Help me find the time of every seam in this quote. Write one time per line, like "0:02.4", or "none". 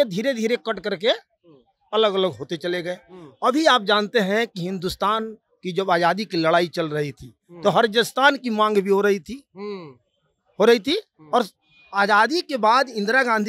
none